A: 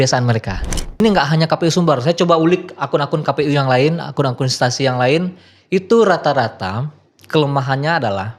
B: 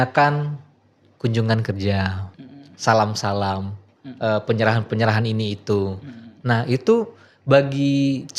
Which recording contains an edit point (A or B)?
A